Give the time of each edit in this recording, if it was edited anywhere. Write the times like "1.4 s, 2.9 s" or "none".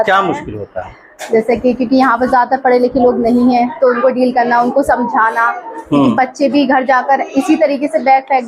none